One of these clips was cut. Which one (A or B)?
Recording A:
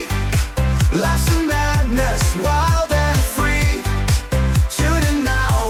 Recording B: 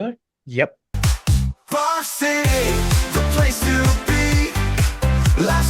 B